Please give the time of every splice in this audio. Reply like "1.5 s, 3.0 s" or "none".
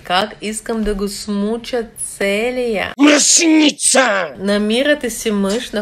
4.3 s